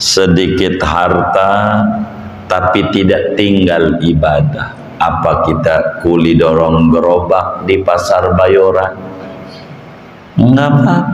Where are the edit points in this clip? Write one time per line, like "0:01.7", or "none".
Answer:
none